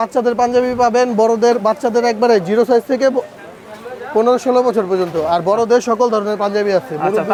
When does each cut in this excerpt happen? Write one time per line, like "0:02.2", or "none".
none